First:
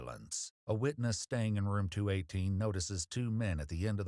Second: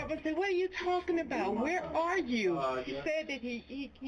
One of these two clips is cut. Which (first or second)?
second